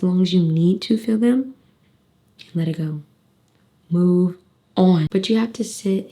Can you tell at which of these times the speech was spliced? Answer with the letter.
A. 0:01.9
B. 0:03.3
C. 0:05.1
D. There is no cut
C